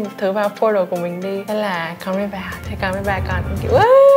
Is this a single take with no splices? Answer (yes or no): no